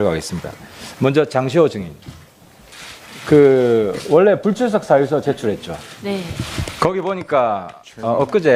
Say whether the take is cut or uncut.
uncut